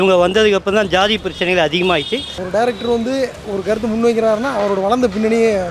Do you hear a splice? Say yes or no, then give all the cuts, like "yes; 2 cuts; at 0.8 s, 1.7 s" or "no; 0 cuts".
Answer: yes; 1 cut; at 2.4 s